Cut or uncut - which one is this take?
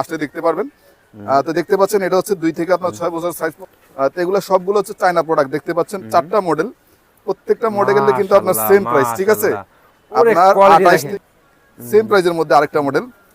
cut